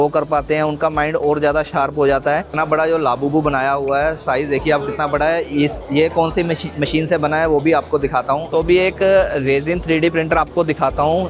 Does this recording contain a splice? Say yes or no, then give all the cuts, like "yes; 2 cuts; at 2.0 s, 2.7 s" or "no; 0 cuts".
yes; 2 cuts; at 2.5 s, 8.4 s